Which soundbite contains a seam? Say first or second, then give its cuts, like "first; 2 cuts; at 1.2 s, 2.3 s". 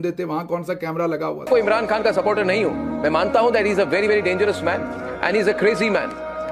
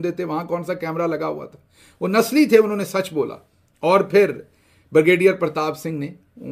first; 1 cut; at 1.5 s